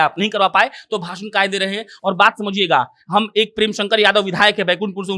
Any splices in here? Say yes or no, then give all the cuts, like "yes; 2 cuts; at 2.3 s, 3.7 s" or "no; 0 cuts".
no; 0 cuts